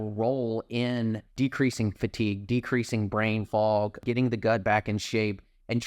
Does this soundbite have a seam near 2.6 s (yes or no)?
no